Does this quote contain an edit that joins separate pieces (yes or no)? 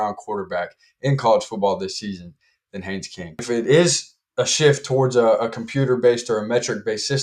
yes